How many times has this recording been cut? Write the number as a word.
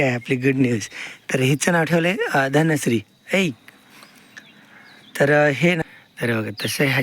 one